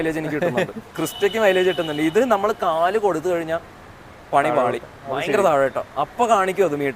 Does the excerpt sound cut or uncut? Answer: uncut